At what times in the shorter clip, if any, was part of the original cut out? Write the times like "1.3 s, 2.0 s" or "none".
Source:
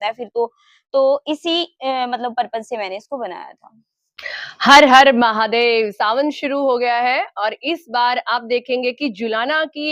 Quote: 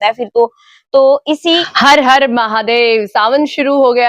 1.7 s